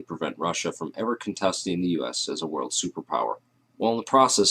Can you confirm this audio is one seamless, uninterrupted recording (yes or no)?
no